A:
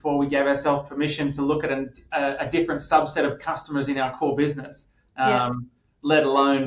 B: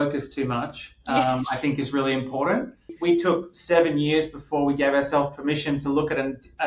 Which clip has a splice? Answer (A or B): B